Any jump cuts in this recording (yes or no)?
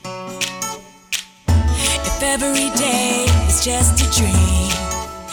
no